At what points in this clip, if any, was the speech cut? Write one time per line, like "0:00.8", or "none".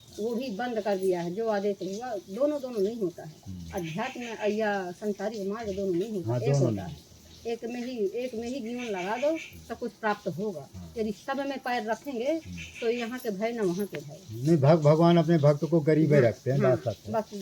none